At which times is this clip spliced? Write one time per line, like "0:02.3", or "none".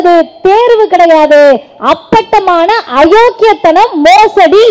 none